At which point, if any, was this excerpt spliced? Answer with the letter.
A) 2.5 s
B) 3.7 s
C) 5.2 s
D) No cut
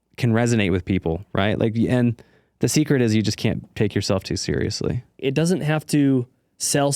C